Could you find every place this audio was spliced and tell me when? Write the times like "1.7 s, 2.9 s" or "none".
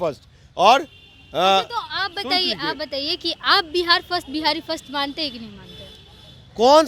none